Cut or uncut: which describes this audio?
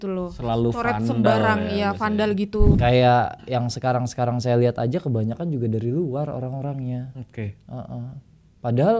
cut